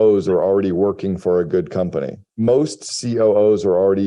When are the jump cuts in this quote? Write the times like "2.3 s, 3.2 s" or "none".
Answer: 2.2 s